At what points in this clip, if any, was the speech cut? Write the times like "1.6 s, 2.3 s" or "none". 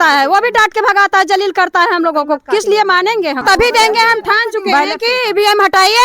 3.4 s